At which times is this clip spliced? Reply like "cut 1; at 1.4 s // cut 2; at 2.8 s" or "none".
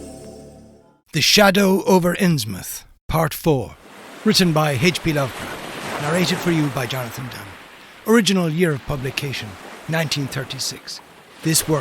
cut 1; at 0.9 s